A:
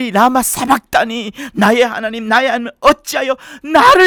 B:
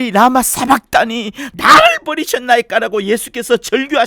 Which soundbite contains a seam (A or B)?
B